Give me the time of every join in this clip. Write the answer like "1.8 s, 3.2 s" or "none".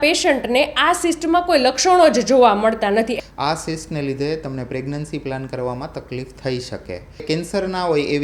3.2 s, 7.2 s